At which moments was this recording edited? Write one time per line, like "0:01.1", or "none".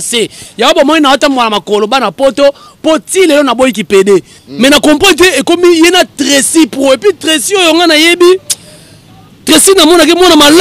0:04.4